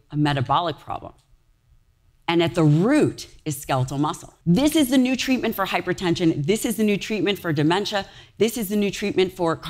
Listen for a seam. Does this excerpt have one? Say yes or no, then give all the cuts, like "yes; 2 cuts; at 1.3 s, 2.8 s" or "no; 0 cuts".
yes; 1 cut; at 4.3 s